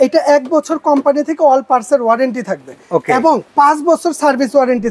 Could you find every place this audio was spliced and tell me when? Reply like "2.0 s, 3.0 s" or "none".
3.5 s